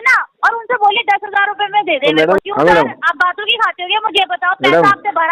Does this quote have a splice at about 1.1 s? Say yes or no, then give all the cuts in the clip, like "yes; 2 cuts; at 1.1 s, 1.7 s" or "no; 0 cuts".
no; 1 cut; at 2.4 s